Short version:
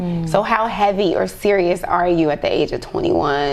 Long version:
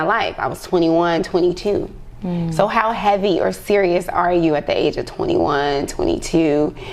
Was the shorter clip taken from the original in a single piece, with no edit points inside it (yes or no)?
yes